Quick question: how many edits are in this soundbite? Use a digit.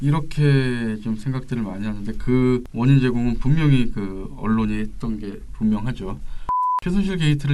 2